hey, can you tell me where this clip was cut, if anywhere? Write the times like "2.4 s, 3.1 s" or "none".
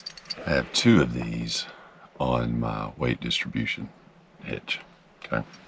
none